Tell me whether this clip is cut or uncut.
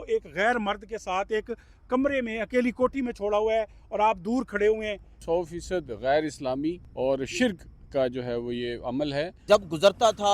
cut